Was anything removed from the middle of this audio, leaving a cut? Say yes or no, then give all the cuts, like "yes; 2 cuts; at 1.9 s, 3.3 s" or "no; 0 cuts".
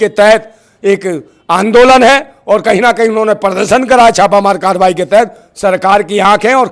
no; 0 cuts